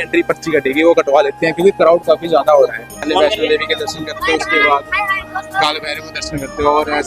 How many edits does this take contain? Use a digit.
1